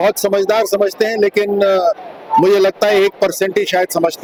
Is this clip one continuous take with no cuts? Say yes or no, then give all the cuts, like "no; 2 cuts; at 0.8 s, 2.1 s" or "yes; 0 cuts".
yes; 0 cuts